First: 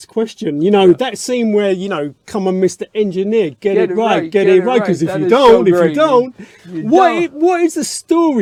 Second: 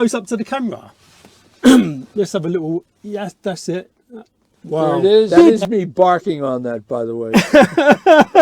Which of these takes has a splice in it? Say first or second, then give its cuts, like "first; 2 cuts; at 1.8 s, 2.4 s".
second; 1 cut; at 5.3 s